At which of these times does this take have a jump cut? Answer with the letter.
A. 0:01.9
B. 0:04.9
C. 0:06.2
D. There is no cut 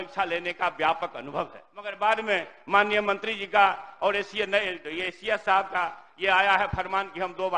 A